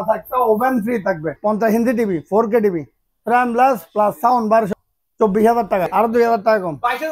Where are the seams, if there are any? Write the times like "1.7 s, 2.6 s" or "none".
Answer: 1.4 s, 4.7 s, 5.9 s